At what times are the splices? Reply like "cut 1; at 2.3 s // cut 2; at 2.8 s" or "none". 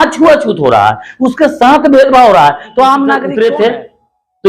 cut 1; at 3.3 s